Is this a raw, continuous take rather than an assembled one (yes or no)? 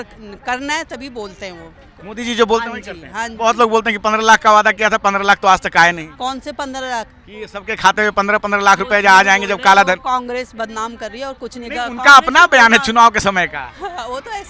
yes